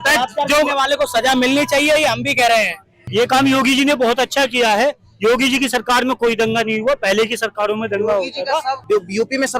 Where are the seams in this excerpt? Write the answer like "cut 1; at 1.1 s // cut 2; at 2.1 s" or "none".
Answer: cut 1; at 3.1 s // cut 2; at 8.8 s